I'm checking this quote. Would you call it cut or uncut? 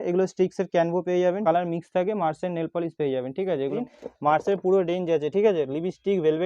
cut